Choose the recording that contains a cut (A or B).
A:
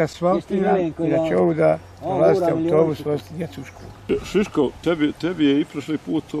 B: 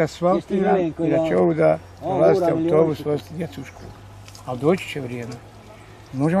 A